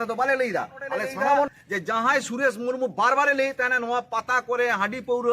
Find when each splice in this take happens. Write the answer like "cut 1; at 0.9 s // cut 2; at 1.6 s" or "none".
cut 1; at 1.5 s